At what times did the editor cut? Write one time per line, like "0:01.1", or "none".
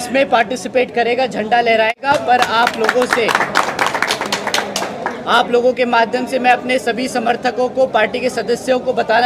none